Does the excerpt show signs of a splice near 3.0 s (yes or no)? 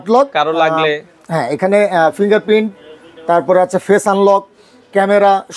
no